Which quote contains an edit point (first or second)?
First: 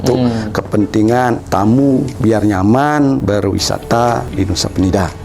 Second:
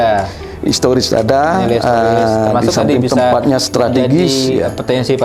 first